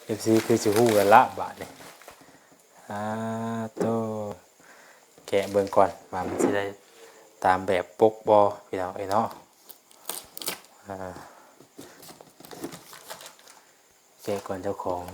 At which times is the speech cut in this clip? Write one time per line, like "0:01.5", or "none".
0:04.4
0:12.0